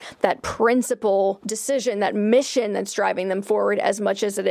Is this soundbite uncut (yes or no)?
no